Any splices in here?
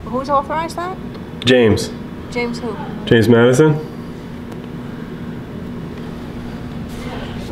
no; 0 cuts

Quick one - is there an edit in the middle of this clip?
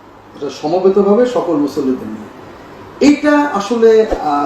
no; 0 cuts

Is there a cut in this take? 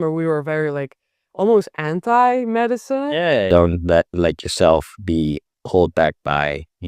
yes; 1 cut; at 3.5 s

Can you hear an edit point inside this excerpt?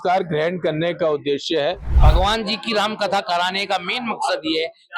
yes; 1 cut; at 1.9 s

